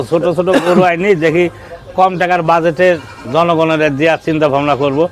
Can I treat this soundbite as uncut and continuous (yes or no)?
yes